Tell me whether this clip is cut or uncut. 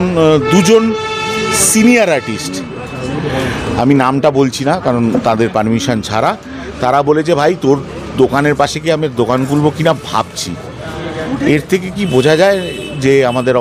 uncut